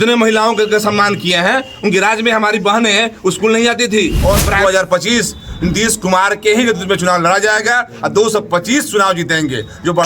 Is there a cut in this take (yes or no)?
yes